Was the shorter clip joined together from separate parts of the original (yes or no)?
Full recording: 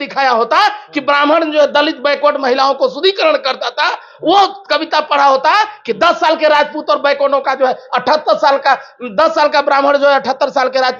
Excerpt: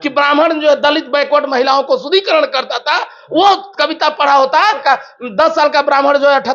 yes